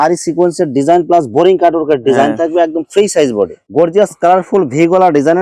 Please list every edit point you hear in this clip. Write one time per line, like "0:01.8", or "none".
0:03.6